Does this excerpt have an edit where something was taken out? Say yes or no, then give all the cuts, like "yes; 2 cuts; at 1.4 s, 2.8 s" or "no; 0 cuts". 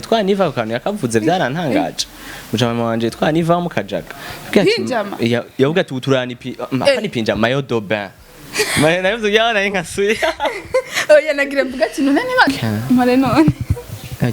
yes; 1 cut; at 12.5 s